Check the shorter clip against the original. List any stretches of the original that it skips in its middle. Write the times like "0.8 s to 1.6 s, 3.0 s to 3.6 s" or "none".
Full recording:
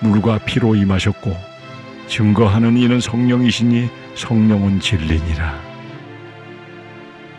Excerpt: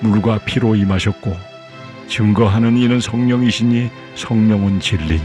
none